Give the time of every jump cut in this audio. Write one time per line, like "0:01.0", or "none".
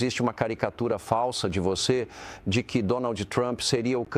none